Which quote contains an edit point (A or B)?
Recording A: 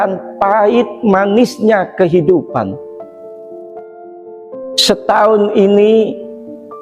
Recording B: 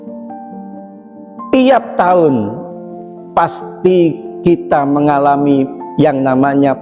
A